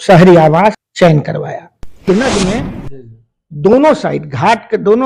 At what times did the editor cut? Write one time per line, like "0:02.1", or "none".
0:00.9
0:02.1